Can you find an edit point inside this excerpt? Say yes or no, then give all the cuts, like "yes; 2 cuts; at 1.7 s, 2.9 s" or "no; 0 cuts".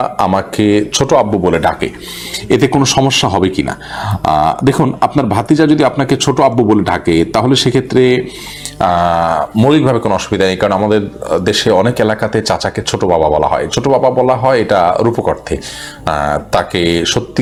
no; 0 cuts